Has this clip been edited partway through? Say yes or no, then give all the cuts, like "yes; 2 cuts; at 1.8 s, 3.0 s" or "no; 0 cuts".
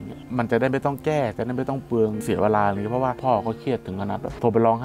yes; 2 cuts; at 2.2 s, 3.2 s